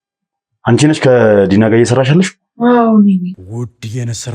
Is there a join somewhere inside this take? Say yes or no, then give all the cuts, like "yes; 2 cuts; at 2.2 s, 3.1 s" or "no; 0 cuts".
yes; 1 cut; at 3.4 s